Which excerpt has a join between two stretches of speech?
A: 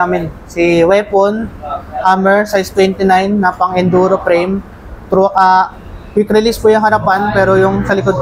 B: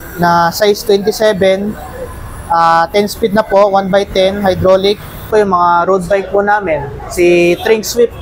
B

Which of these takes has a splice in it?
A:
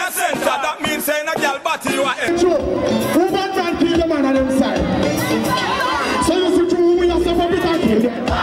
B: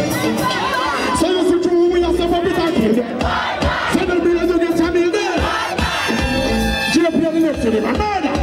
A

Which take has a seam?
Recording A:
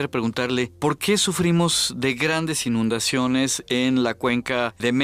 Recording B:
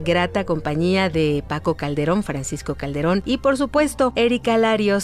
B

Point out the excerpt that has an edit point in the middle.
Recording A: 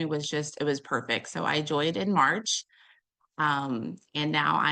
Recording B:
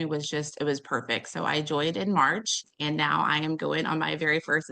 B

